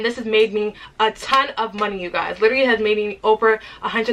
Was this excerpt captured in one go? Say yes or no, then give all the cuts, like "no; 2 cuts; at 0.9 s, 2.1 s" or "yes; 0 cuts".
yes; 0 cuts